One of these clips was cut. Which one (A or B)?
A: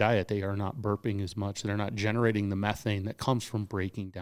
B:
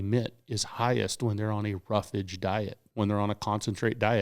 B